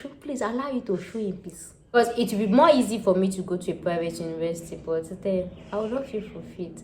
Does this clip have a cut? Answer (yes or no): yes